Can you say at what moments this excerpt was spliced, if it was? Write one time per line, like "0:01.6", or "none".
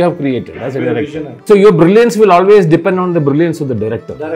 0:01.3

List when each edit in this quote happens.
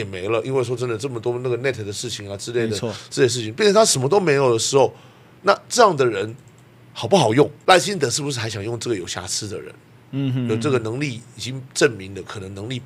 0:07.6

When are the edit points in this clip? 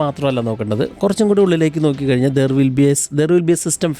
none

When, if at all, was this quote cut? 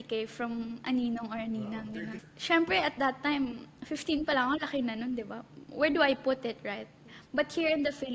0:01.9
0:07.0

